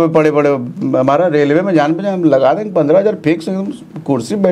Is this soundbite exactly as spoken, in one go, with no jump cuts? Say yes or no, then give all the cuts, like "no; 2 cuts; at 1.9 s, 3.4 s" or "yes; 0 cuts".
yes; 0 cuts